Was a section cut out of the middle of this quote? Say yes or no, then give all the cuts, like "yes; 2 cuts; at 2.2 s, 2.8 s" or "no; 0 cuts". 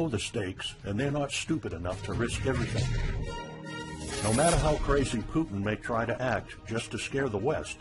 no; 0 cuts